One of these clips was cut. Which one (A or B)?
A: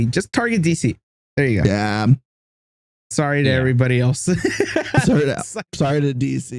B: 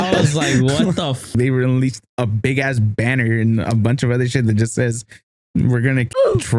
B